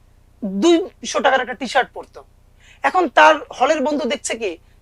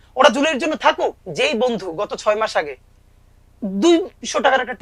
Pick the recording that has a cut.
second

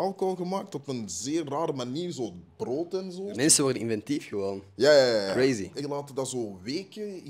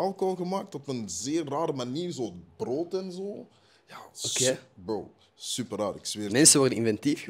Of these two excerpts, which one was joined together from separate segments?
first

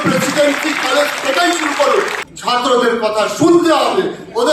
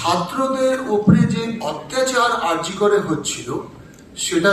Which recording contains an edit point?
first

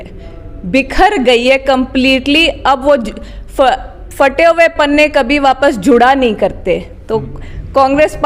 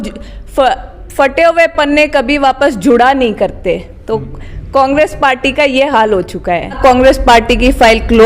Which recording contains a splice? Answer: second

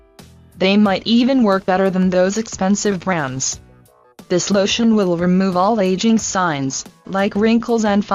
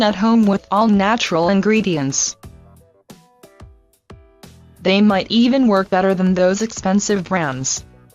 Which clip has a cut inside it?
second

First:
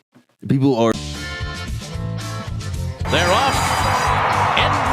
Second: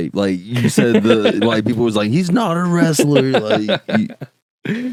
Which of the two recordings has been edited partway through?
first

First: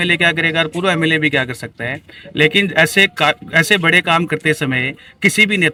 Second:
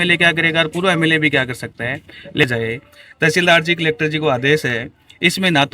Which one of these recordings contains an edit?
second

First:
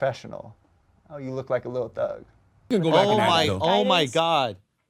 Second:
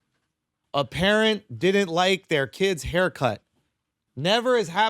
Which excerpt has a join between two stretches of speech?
first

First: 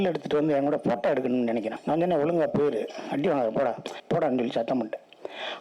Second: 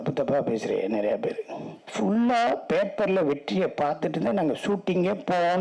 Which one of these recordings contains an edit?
first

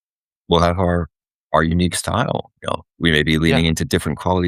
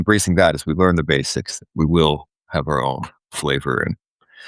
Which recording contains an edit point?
first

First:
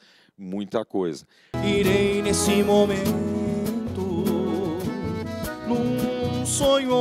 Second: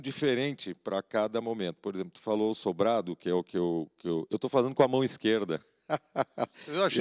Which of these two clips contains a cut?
first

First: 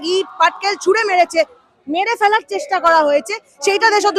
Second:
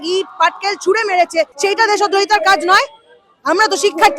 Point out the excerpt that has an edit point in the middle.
second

